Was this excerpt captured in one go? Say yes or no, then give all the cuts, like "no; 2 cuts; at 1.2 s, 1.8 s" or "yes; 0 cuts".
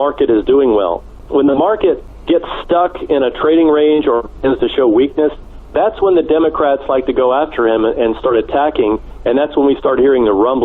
no; 2 cuts; at 1.1 s, 2.1 s